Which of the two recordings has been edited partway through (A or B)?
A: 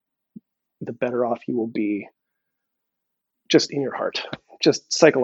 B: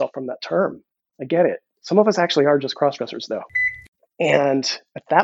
B